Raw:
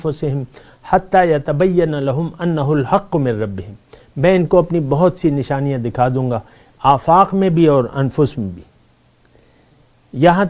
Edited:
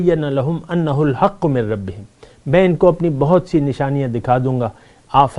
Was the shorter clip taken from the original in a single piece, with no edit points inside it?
yes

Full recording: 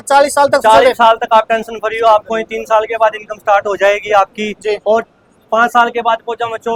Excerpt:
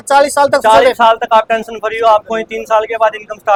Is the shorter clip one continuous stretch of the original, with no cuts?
yes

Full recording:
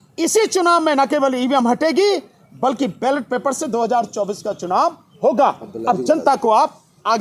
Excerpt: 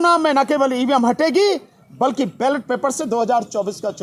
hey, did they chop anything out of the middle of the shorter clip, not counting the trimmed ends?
no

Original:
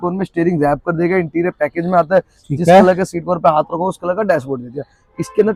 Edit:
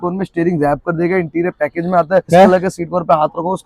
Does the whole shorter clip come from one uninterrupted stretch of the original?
no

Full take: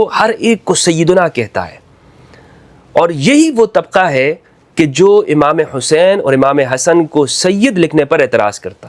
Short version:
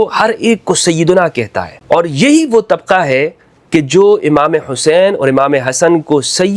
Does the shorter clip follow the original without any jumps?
no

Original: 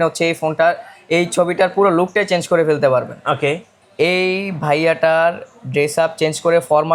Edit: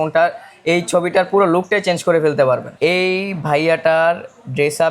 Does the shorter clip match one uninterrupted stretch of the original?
no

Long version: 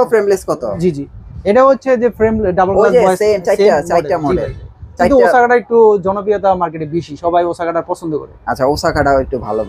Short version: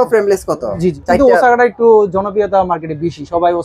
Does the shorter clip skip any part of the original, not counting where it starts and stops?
yes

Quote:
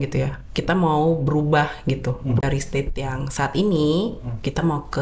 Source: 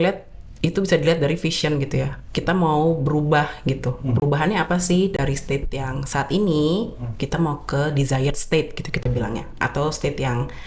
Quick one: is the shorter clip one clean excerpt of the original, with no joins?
no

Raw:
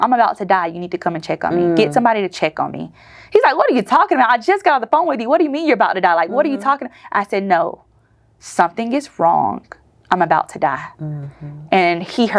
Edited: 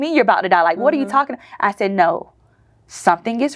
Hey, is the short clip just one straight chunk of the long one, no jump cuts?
yes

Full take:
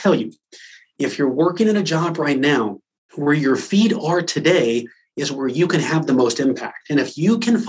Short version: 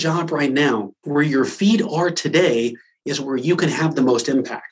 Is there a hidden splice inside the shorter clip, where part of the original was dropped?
yes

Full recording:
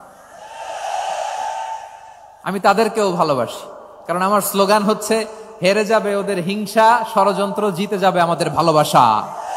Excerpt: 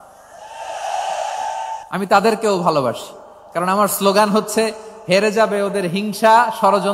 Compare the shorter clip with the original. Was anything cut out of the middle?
yes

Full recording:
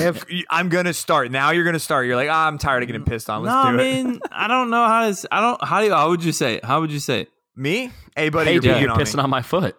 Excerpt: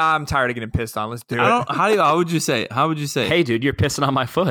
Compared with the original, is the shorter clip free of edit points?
no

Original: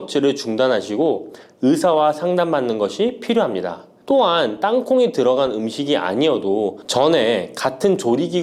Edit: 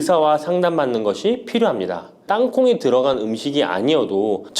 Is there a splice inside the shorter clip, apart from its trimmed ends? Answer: yes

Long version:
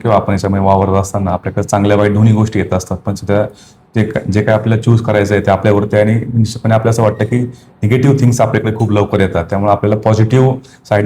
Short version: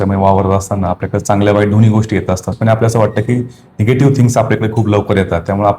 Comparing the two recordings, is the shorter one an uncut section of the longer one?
no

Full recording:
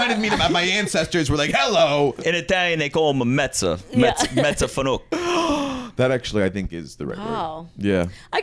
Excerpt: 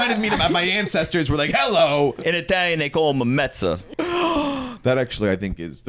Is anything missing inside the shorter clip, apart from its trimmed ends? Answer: yes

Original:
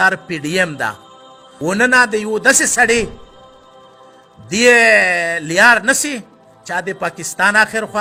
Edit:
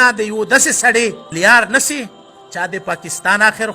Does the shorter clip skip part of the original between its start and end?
yes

